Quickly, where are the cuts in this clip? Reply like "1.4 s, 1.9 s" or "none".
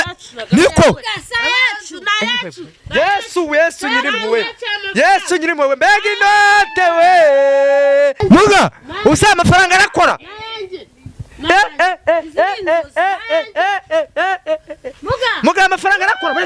none